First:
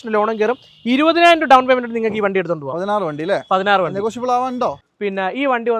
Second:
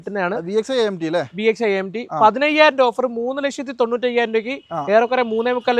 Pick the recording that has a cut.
first; 1 cut; at 4.9 s

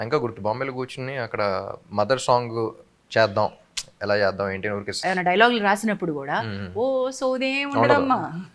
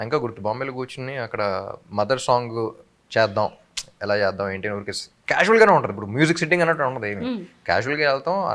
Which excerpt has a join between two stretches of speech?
first; 1 cut; at 5.0 s

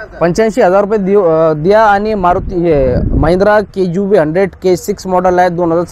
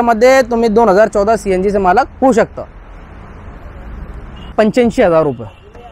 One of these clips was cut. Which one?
second; 1 cut; at 4.5 s

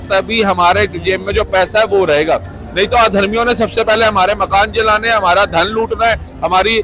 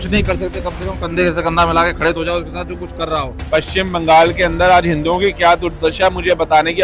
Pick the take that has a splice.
second; 1 cut; at 3.4 s

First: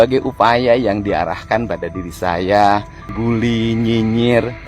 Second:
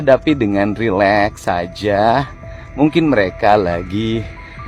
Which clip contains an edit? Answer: first; 1 cut; at 3.1 s

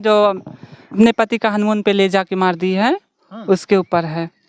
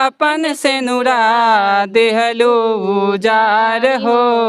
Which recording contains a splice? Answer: first; 1 cut; at 1.0 s

